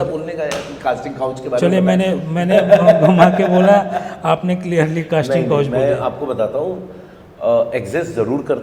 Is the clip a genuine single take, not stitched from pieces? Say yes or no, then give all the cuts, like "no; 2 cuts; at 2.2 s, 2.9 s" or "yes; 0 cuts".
yes; 0 cuts